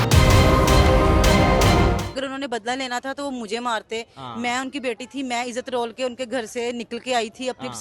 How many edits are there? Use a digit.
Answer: 1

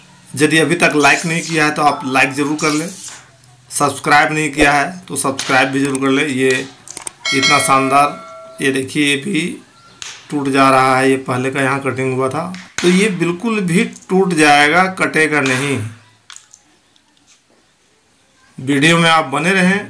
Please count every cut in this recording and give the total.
0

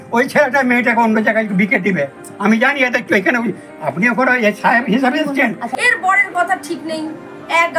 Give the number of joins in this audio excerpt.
1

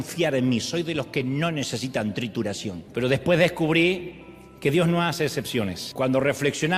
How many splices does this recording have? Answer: 2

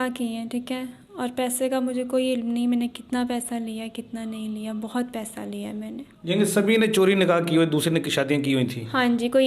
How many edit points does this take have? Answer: 1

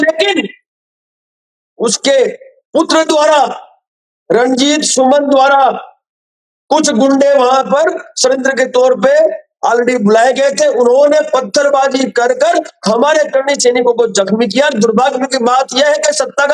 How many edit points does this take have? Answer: 0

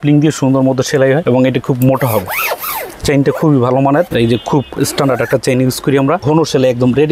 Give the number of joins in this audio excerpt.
3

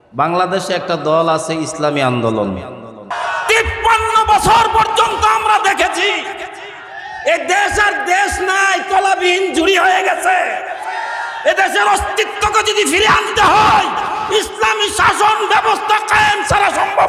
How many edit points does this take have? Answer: 1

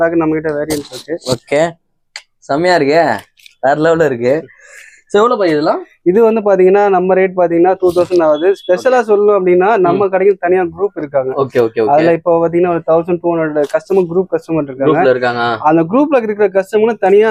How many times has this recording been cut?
0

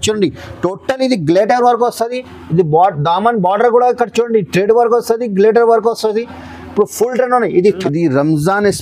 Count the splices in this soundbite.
1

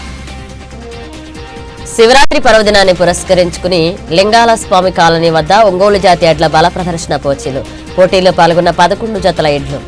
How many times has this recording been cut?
0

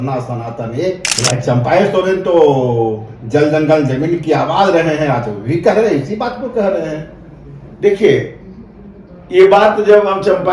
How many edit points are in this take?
1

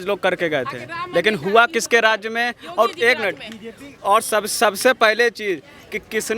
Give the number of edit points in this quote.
0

